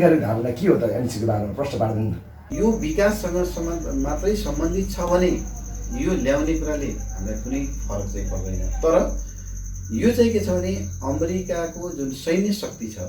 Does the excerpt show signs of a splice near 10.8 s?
no; 1 cut; at 2.4 s

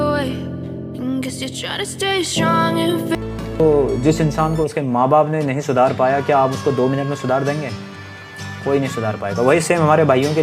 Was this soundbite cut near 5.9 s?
no; 1 cut; at 3.1 s

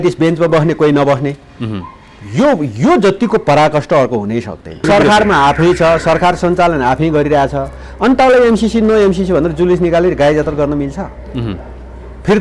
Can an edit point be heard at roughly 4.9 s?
yes; 1 cut; at 4.9 s

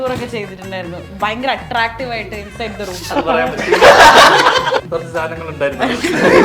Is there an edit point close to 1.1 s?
yes; 2 cuts; at 1.1 s, 4.8 s

